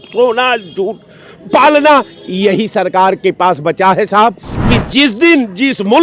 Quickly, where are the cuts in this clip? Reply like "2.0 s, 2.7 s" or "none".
4.5 s